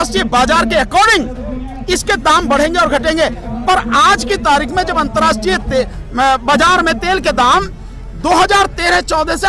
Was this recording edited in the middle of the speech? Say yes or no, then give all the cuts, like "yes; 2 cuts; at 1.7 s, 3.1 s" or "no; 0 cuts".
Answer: no; 0 cuts